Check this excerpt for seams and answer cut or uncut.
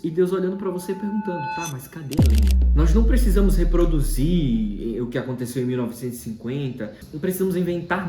cut